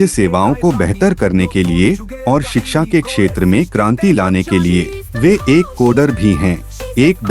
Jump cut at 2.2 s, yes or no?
no